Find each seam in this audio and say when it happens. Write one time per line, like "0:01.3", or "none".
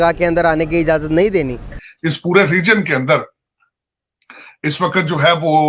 0:01.8